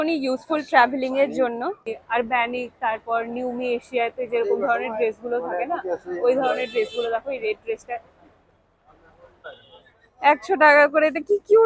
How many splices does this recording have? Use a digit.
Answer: 2